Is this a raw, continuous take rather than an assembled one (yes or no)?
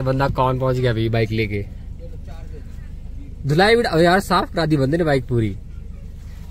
yes